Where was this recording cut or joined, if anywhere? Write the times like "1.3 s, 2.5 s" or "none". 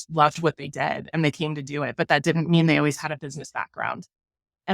none